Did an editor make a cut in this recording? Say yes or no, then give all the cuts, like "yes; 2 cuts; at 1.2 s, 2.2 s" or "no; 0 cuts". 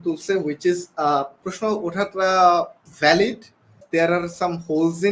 yes; 1 cut; at 3.8 s